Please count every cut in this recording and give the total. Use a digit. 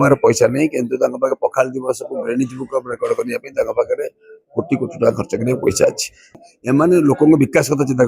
1